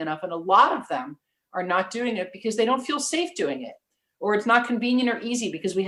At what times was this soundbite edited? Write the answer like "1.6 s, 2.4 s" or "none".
none